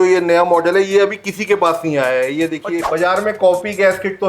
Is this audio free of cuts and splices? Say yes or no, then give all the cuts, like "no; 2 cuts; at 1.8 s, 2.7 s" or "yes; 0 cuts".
no; 1 cut; at 2.8 s